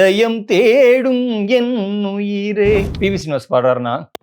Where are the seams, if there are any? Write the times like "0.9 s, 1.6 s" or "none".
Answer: 2.9 s